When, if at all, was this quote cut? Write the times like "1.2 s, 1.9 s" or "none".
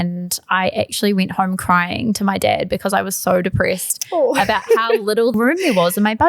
5.3 s